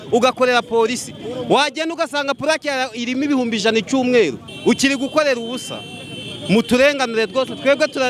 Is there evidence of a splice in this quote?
no; 0 cuts

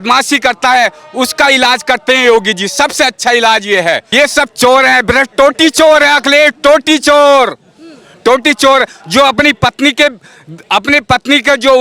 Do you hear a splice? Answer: yes; 1 cut; at 4.1 s

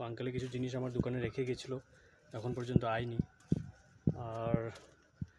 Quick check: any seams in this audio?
no; 0 cuts

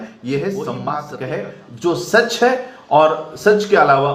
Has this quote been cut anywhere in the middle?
yes; 1 cut; at 0.9 s

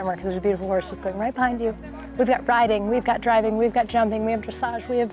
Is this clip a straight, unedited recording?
yes; 0 cuts

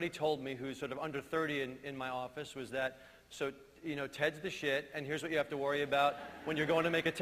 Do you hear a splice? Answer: yes; 1 cut; at 3.5 s

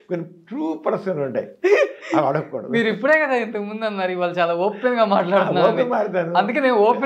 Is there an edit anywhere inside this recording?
no; 0 cuts

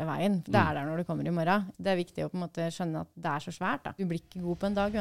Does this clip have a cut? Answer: yes; 2 cuts; at 1.7 s, 4.0 s

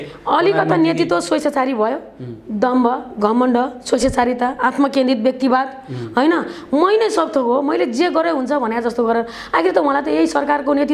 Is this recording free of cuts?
yes; 0 cuts

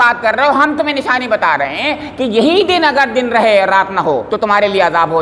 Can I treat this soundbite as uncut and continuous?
no; 1 cut; at 4.3 s

